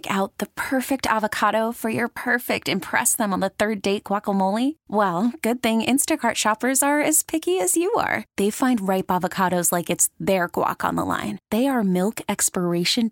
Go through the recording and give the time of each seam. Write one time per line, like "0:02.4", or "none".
none